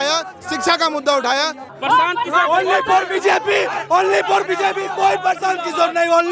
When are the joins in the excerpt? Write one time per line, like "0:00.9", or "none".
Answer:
0:01.6

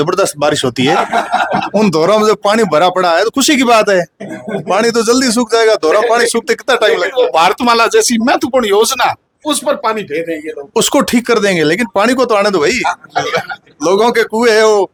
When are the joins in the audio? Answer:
none

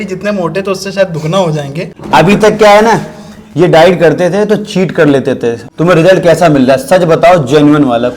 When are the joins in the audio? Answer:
0:01.9
0:05.6

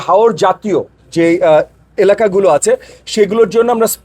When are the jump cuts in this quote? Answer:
0:01.0

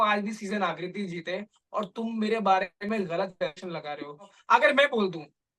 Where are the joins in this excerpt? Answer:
0:04.4

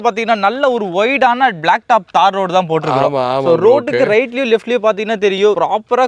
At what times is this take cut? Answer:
none

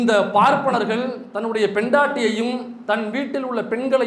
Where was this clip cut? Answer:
none

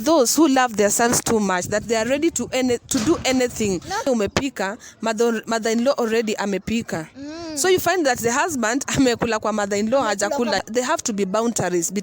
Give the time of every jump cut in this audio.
0:04.1
0:10.6

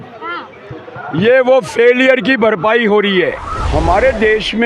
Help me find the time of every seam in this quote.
0:03.5

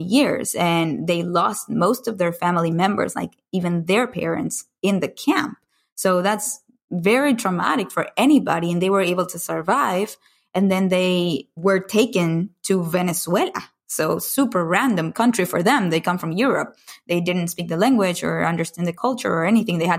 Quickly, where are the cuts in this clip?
0:11.5
0:18.9

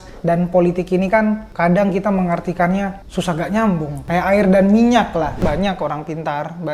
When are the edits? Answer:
0:01.5
0:03.0
0:04.1
0:05.4

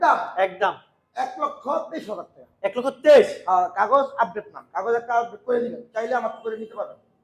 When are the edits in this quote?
none

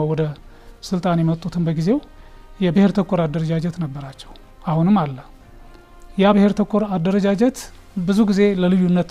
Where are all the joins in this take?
none

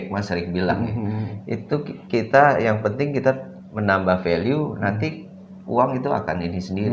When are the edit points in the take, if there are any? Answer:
none

